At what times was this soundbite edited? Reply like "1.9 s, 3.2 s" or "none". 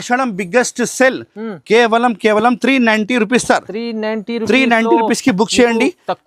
none